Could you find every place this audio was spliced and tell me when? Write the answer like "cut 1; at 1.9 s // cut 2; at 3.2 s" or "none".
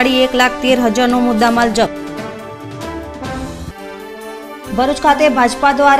none